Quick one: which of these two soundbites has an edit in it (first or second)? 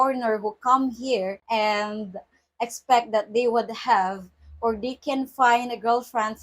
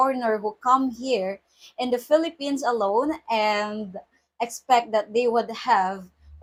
first